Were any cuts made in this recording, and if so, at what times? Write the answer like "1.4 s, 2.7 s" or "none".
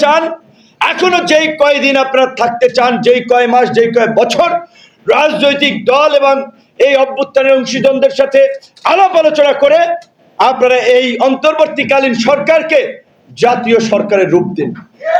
none